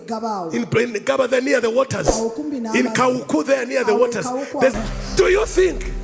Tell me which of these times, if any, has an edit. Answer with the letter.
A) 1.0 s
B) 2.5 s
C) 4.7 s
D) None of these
C